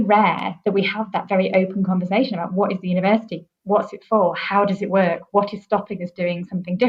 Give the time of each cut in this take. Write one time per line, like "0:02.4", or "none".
none